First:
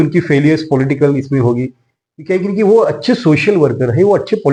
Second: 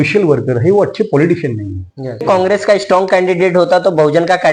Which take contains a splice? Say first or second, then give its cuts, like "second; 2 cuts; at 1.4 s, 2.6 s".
second; 1 cut; at 2.2 s